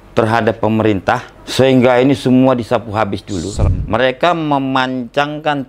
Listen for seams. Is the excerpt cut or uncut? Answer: cut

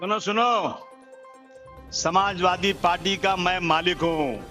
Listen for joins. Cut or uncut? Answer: uncut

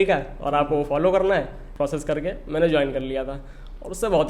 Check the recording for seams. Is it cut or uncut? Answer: cut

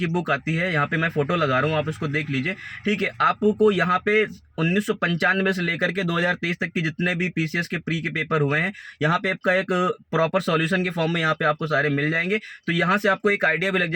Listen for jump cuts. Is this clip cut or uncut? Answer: uncut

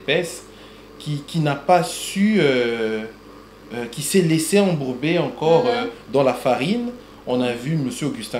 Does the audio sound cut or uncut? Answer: uncut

